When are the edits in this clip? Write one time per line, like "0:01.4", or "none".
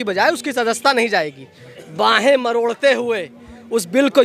none